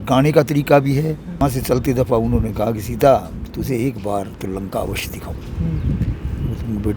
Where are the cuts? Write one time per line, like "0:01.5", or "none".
0:01.4